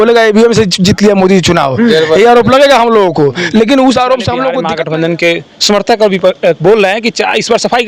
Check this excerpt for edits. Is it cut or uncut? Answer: cut